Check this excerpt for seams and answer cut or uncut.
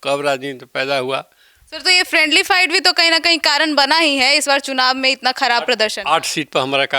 uncut